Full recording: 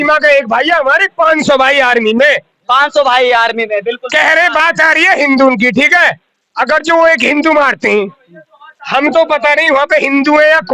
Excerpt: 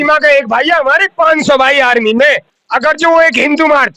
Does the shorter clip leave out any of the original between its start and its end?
yes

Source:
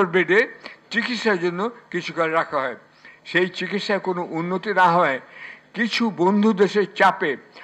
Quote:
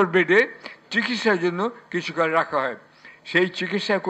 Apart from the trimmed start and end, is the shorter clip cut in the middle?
no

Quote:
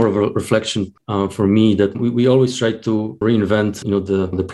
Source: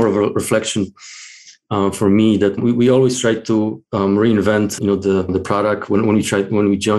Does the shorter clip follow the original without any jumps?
no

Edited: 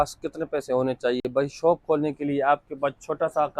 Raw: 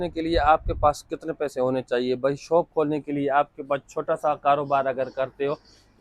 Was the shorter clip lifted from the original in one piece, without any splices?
yes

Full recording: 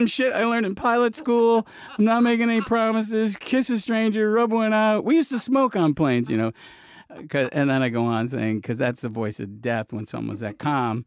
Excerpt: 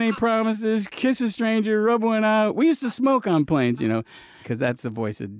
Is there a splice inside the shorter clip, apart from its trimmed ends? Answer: yes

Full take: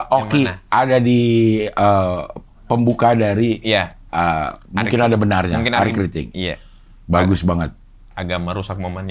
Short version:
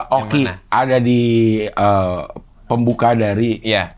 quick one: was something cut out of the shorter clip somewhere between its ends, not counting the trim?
no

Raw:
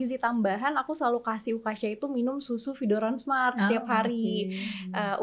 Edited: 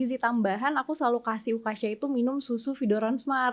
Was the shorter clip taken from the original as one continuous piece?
yes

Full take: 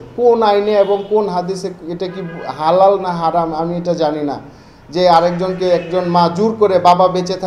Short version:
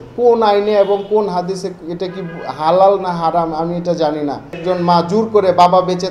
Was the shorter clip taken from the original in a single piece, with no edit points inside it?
no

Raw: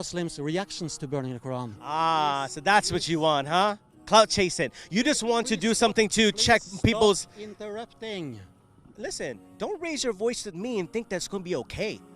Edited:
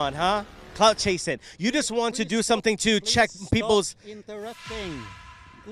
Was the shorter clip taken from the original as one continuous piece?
yes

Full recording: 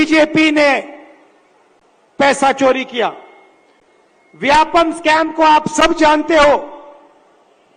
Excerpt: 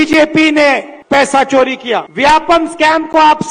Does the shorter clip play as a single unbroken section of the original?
no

